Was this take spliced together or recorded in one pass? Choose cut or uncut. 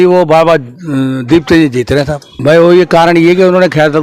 cut